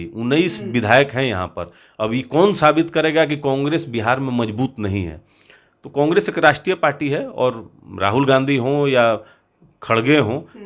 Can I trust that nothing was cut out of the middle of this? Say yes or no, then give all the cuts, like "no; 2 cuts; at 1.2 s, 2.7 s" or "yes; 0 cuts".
yes; 0 cuts